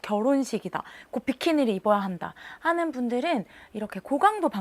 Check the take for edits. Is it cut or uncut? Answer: uncut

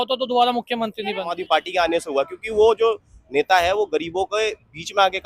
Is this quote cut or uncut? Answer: cut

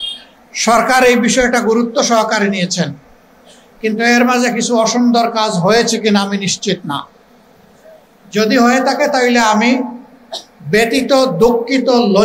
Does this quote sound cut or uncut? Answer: uncut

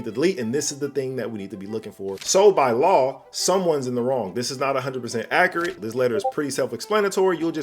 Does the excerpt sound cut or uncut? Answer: cut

